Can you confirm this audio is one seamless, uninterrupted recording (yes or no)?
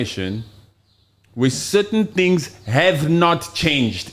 yes